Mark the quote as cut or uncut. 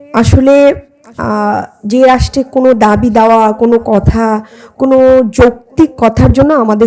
uncut